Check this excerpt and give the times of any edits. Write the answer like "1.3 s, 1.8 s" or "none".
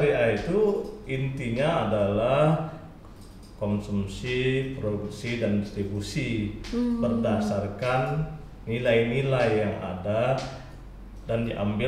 none